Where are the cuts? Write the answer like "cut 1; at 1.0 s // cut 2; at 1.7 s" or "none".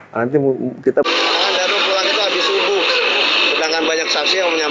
cut 1; at 0.9 s